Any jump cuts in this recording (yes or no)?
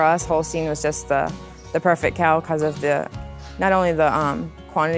no